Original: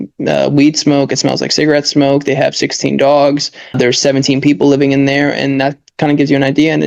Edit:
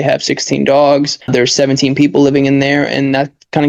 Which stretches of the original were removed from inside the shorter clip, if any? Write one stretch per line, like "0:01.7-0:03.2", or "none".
0:03.5-0:03.6